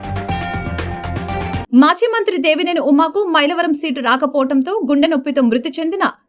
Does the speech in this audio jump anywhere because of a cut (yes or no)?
yes